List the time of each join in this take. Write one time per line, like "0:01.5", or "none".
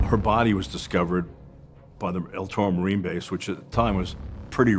none